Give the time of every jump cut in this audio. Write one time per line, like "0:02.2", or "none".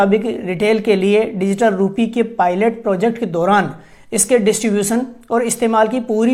none